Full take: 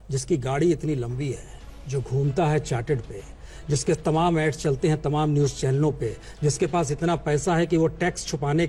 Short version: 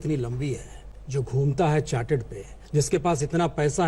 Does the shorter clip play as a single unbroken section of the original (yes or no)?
no